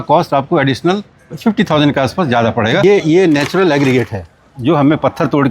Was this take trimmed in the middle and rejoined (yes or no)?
yes